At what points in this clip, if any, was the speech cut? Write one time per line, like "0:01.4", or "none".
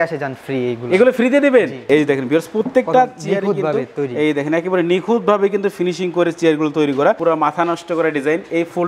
0:01.8
0:07.2